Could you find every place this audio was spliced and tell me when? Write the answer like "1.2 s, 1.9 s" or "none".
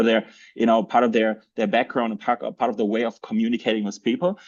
none

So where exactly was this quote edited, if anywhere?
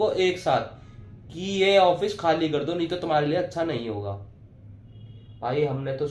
none

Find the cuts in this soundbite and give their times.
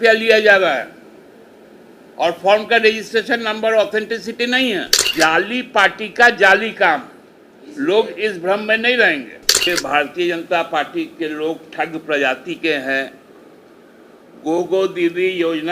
5.0 s, 9.7 s

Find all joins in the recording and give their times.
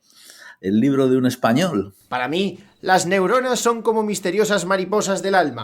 2.0 s

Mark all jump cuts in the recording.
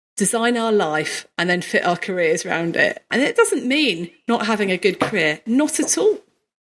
3.1 s

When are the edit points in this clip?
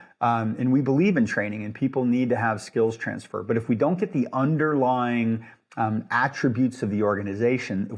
none

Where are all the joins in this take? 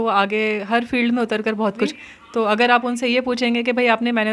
1.9 s

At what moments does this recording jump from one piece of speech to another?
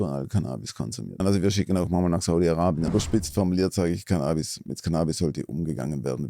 1.2 s, 2.9 s

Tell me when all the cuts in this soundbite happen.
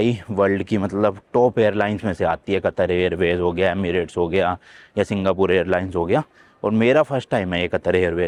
none

